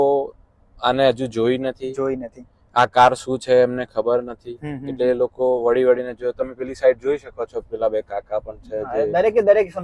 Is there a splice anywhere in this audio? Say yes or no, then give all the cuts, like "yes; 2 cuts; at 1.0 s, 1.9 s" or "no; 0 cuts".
no; 0 cuts